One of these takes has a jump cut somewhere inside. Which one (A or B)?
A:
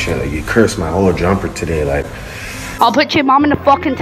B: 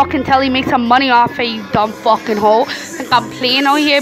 A